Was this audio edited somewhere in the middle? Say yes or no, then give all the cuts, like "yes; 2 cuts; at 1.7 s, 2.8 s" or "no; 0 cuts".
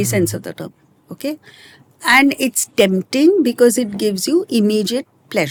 no; 0 cuts